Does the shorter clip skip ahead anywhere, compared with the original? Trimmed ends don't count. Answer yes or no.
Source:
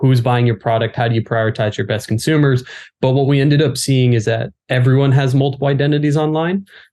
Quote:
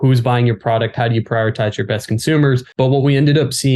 yes